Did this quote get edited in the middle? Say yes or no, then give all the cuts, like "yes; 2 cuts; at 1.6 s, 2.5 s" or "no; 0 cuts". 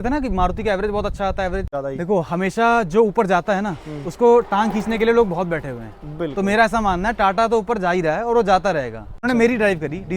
yes; 2 cuts; at 1.7 s, 9.2 s